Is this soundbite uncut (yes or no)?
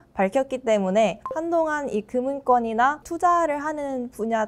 no